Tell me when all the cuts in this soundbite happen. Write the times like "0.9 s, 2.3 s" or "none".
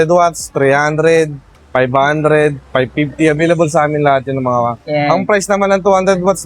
none